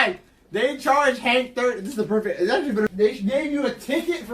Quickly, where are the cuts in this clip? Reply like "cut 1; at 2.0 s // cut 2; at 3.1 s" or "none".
cut 1; at 2.9 s